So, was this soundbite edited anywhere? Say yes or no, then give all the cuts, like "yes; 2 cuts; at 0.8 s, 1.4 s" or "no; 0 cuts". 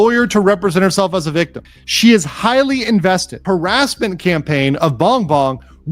yes; 1 cut; at 3.4 s